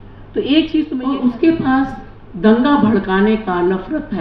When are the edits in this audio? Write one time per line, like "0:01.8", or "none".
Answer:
0:01.0